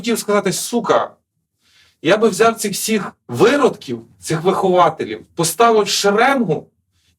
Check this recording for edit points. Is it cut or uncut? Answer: cut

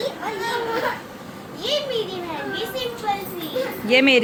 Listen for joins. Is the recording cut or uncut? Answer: uncut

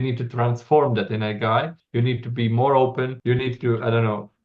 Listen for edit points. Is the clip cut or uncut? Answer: cut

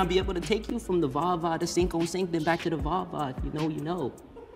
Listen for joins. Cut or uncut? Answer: uncut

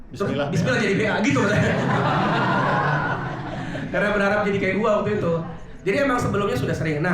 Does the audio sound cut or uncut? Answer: uncut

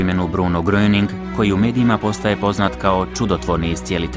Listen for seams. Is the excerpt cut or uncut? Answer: uncut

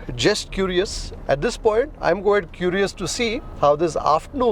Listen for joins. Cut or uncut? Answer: cut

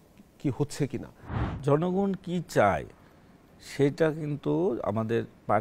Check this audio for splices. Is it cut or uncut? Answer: cut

